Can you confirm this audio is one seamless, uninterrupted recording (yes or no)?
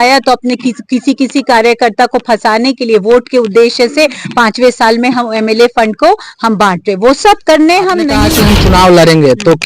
no